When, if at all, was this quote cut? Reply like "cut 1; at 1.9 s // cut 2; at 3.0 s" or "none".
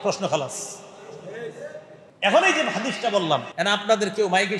cut 1; at 2.0 s // cut 2; at 3.5 s

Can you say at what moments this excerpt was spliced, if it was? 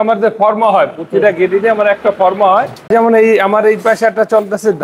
cut 1; at 2.9 s

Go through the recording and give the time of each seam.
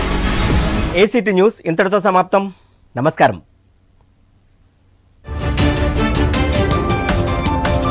none

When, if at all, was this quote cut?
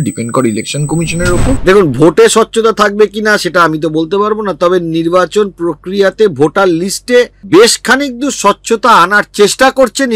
cut 1; at 1.6 s // cut 2; at 7.4 s

